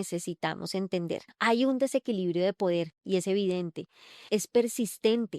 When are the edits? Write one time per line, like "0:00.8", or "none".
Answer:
0:01.3
0:04.2